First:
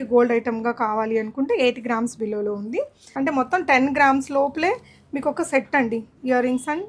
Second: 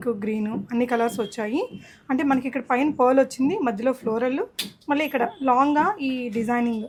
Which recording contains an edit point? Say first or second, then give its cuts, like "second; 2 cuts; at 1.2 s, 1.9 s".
first; 1 cut; at 3.1 s